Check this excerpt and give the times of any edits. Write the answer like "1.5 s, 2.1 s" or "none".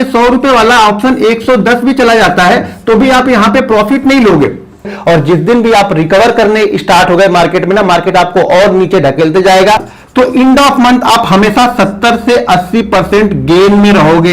4.9 s, 9.9 s